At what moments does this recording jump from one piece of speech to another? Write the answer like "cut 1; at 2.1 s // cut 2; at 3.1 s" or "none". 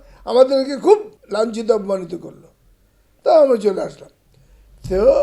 cut 1; at 1.2 s